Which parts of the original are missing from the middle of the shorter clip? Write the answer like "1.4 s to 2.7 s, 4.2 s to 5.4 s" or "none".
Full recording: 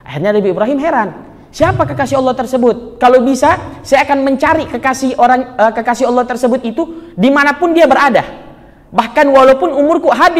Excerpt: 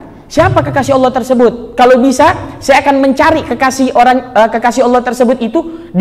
none